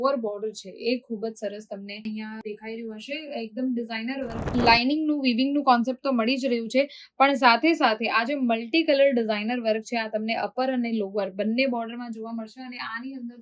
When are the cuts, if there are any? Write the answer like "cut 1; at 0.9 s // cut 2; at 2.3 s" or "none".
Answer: cut 1; at 4.4 s